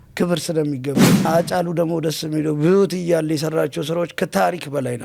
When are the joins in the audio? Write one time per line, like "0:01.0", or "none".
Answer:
0:01.3